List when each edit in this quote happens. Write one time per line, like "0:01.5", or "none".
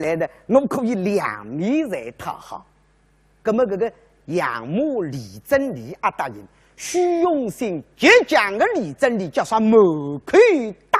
0:02.2